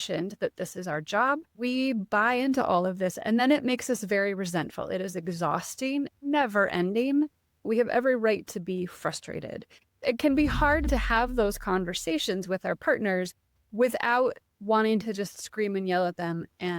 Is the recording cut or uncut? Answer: cut